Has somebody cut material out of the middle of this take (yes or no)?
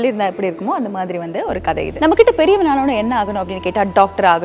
yes